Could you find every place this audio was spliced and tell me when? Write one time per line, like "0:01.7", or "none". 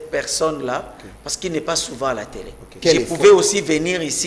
0:02.7